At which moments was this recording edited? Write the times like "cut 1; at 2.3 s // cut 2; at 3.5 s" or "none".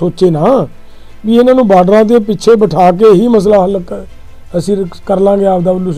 none